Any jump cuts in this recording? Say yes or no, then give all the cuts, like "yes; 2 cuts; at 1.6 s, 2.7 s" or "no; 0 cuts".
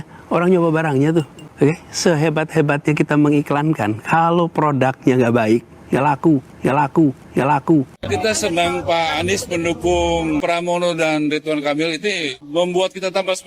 yes; 1 cut; at 8.0 s